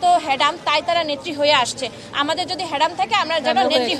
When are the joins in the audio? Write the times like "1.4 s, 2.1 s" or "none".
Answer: none